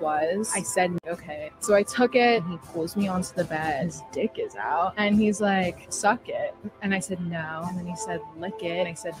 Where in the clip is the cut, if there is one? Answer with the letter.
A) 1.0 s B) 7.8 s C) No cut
A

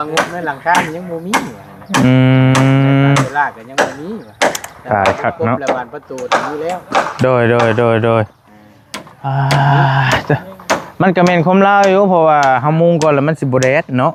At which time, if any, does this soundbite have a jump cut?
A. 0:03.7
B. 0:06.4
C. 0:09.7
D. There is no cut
D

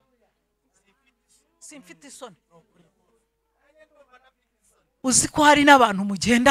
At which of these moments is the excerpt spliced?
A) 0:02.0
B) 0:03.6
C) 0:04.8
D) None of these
C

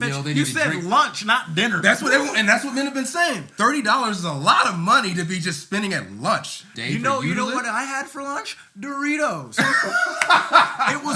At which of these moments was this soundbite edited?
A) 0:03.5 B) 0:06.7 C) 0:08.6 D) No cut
B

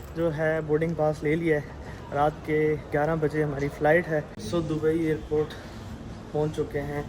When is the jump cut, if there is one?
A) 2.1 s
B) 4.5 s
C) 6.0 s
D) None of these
B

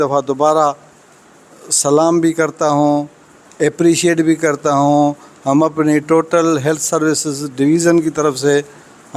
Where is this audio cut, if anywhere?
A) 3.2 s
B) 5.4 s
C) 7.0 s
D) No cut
D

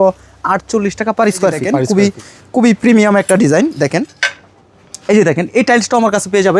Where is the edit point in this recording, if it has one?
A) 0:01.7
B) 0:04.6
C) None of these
A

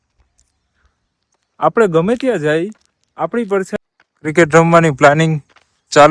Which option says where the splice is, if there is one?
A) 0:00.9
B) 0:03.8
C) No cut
B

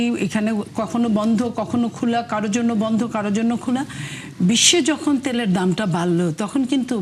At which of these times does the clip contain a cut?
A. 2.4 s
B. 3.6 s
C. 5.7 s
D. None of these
D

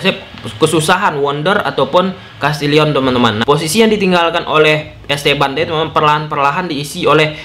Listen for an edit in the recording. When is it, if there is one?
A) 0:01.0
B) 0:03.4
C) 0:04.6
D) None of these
B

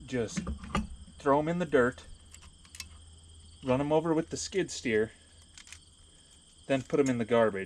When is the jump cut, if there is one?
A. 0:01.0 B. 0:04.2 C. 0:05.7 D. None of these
D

